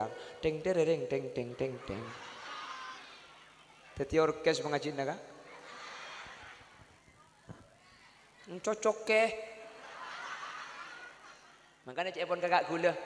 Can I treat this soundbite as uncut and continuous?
no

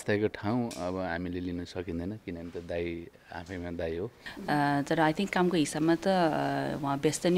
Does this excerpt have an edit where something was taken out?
yes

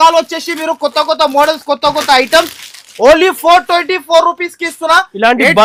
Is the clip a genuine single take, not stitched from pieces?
yes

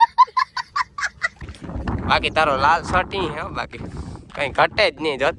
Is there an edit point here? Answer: yes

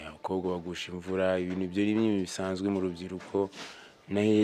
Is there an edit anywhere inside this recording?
no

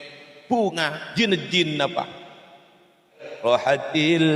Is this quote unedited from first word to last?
no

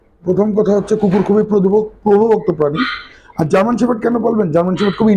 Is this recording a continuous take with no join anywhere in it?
yes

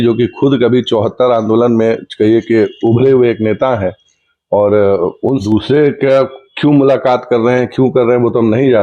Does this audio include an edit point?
yes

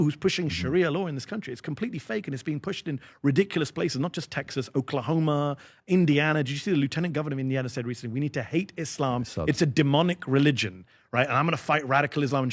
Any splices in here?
no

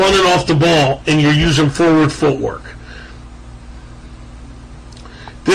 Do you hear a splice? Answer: yes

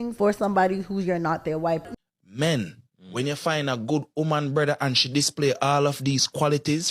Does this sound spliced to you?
yes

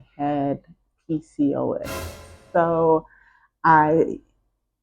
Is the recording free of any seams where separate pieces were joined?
no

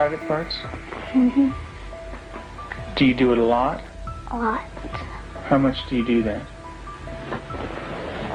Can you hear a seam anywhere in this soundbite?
no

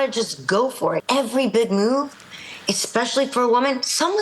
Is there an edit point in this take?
yes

